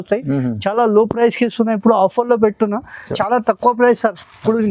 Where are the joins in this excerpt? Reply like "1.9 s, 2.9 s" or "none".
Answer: 3.2 s